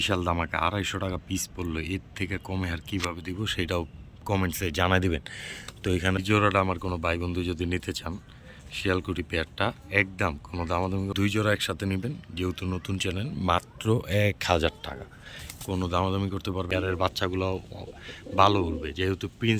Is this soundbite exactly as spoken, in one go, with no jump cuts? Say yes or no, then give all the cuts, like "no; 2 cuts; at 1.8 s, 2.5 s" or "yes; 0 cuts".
no; 3 cuts; at 6.2 s, 11.1 s, 16.7 s